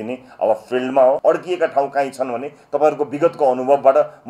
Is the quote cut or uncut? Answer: cut